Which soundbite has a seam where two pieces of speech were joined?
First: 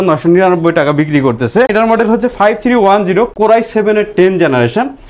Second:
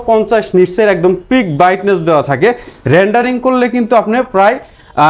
first; 1 cut; at 1.7 s

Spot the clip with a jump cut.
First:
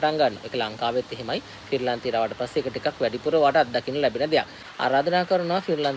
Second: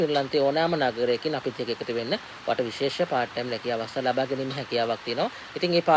first; 1 cut; at 4.6 s

